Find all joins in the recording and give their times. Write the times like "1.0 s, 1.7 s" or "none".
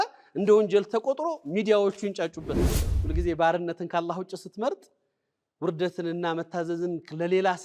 2.7 s